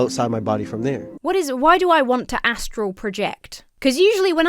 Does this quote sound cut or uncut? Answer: cut